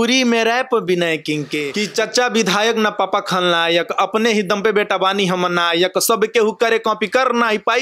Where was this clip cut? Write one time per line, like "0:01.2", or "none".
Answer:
0:01.6